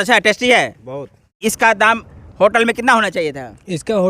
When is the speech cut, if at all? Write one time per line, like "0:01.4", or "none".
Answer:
0:01.4